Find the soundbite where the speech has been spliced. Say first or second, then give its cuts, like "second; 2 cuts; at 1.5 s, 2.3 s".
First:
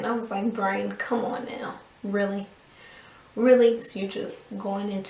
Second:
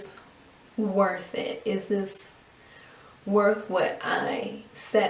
first; 1 cut; at 3.9 s